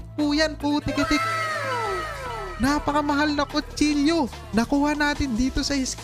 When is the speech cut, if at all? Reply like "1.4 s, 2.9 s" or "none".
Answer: 1.2 s, 2.5 s, 4.4 s